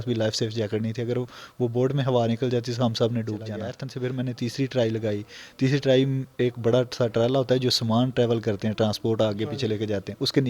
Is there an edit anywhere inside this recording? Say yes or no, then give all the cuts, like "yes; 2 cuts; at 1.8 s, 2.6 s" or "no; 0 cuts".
yes; 1 cut; at 3.8 s